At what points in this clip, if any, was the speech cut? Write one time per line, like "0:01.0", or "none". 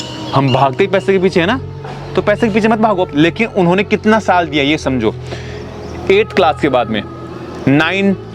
0:03.1